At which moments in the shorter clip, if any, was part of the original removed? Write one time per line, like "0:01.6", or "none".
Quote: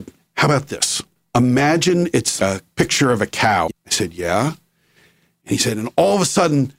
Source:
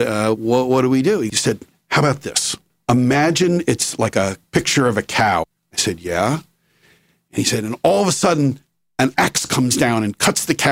0:02.4
0:03.8